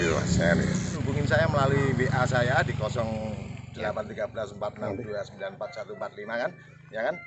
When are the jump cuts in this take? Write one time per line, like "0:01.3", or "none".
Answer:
0:00.9